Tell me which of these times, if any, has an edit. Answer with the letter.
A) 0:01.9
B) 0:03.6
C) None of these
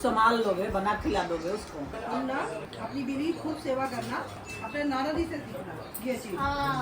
A